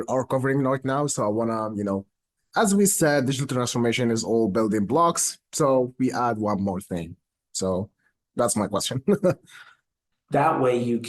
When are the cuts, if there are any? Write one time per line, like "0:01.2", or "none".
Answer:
0:09.8